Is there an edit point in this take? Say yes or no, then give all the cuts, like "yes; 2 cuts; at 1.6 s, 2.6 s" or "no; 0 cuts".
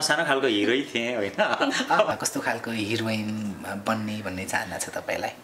yes; 1 cut; at 2.1 s